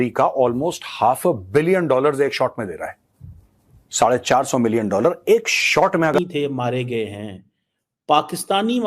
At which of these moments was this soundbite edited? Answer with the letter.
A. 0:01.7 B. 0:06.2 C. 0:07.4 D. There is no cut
B